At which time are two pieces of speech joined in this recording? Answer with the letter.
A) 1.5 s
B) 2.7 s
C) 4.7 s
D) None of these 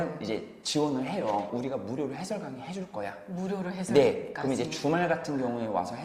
A